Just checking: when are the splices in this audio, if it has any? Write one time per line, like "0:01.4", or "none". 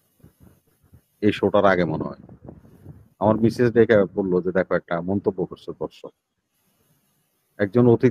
none